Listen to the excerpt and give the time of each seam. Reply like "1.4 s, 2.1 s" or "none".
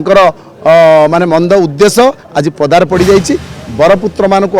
3.5 s